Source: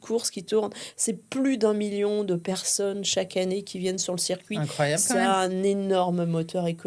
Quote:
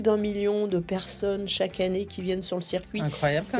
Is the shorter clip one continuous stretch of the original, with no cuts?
yes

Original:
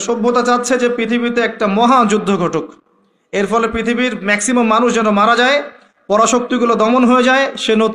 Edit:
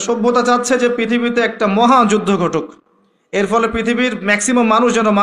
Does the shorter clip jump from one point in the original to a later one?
no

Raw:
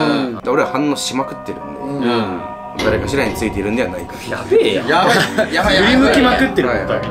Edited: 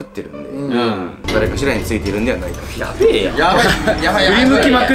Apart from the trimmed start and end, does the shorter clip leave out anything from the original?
yes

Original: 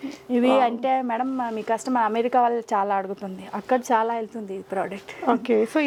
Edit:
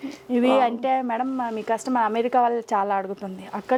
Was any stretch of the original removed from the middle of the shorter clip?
no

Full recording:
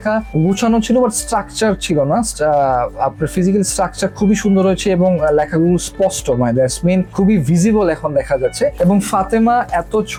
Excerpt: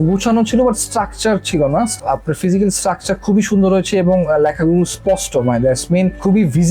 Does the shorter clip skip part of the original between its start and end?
yes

